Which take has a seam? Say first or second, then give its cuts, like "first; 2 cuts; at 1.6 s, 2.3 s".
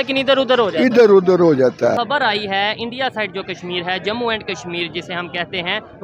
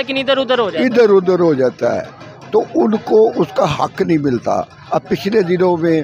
first; 1 cut; at 2.0 s